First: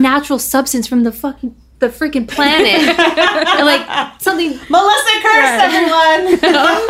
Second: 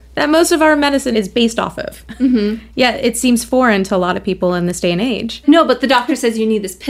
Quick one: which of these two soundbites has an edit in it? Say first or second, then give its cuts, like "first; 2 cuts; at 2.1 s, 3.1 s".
second; 2 cuts; at 1.1 s, 5.4 s